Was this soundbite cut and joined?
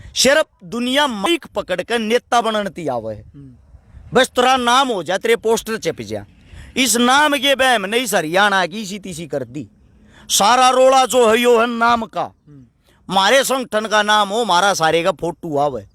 yes; 1 cut; at 1.3 s

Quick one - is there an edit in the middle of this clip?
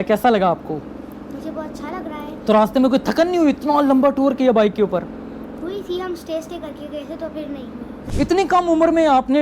yes; 1 cut; at 8.0 s

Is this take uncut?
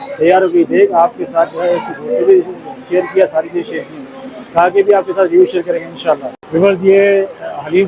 yes; 0 cuts

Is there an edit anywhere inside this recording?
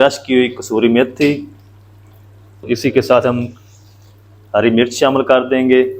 yes; 1 cut; at 2.6 s

